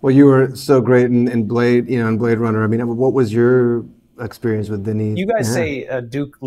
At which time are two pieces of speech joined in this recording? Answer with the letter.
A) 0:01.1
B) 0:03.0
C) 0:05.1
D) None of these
C